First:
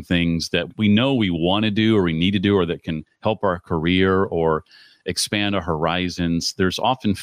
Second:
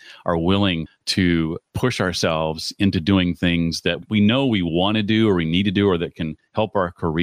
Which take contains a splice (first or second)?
second